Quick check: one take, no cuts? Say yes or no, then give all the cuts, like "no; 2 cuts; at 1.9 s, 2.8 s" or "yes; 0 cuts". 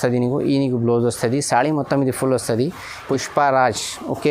no; 1 cut; at 3.0 s